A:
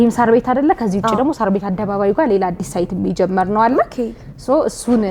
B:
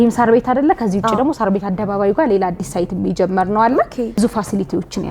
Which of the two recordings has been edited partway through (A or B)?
B